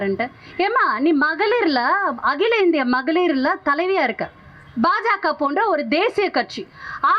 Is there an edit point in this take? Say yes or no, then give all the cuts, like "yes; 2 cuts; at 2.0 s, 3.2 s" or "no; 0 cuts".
no; 0 cuts